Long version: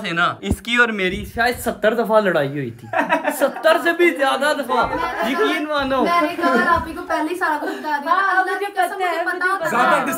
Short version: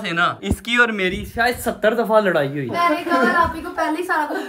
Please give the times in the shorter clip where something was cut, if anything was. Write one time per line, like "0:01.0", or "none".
0:02.8